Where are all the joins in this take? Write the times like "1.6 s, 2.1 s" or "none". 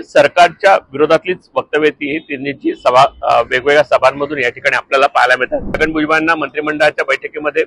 5.7 s